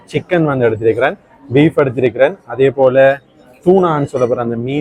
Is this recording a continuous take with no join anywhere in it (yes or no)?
yes